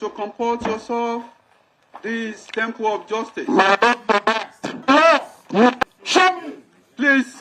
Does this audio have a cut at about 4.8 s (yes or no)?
yes